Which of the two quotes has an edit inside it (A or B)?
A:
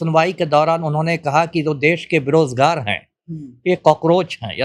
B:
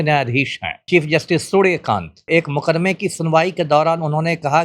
B